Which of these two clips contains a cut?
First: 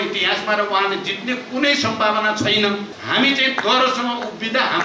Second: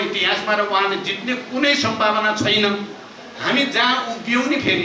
first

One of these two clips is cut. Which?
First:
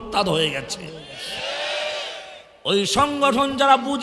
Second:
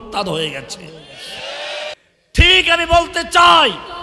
second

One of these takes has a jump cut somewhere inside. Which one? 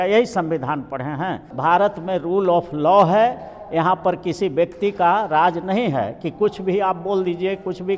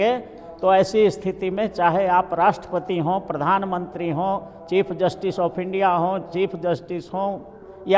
first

